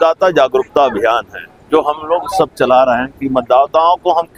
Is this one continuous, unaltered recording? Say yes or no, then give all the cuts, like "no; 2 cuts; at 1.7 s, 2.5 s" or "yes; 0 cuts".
yes; 0 cuts